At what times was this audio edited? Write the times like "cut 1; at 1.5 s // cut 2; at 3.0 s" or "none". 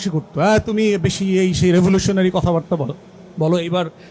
none